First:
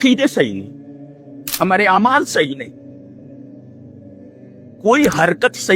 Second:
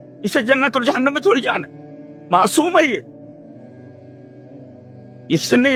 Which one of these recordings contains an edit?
first; 2 cuts; at 3.3 s, 4.8 s

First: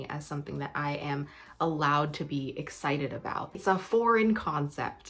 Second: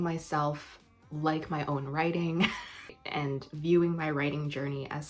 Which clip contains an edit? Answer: second; 1 cut; at 2.7 s

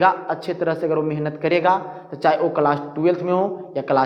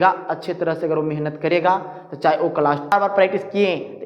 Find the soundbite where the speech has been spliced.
second; 1 cut; at 2.9 s

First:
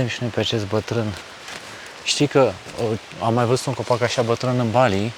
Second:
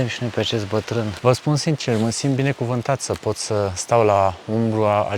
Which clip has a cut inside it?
second; 1 cut; at 1.1 s

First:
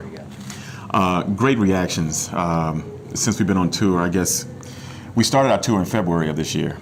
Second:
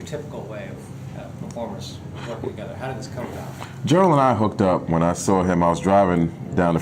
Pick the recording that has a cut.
second; 1 cut; at 5.7 s

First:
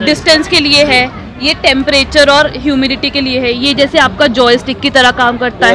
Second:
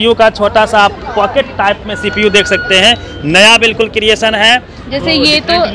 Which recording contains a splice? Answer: second; 1 cut; at 4.8 s

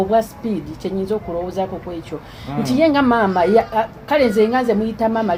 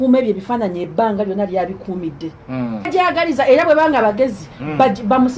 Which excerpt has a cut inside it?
second; 1 cut; at 2.9 s

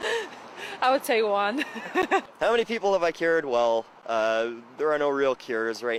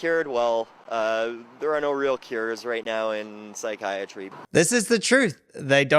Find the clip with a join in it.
second; 1 cut; at 4.4 s

